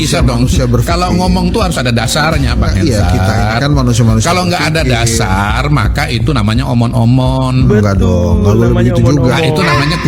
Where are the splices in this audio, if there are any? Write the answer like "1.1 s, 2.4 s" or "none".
none